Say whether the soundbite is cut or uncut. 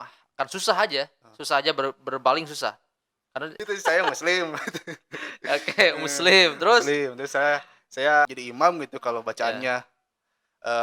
cut